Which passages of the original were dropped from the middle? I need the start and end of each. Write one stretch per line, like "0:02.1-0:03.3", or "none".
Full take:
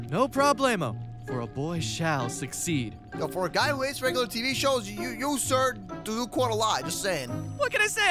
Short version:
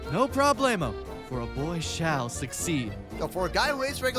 none

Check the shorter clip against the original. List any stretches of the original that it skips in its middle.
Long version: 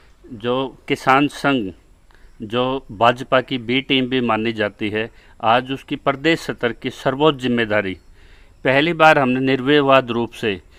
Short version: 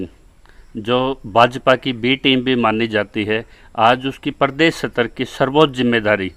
none

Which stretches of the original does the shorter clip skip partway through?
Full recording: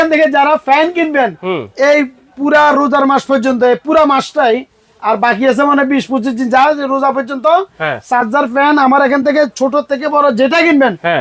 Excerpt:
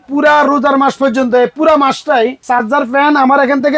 0:04.7-0:08.0

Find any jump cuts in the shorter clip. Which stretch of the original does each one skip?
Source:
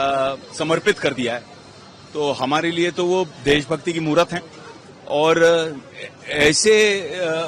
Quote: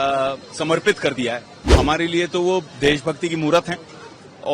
0:01.7-0:02.4

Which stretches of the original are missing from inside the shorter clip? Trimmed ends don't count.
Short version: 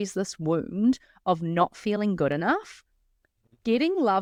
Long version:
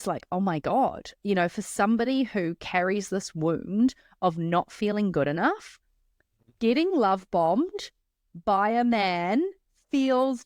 none

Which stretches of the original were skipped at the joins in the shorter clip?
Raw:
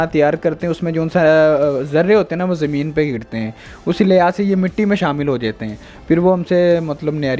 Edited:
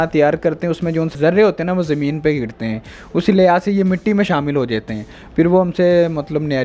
0:01.1-0:01.8

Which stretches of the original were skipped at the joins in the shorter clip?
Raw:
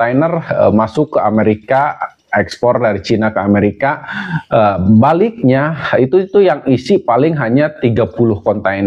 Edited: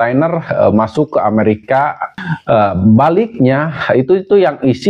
0:02.1-0:04.2

